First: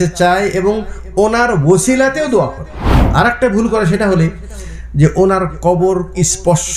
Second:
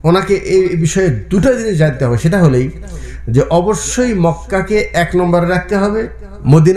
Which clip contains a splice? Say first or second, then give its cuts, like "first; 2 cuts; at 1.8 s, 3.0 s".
first; 1 cut; at 3.0 s